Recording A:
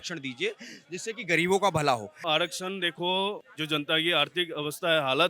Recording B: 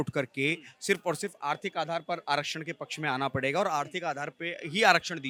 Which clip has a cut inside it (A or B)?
A